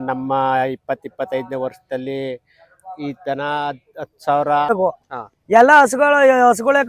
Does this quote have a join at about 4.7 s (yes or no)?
yes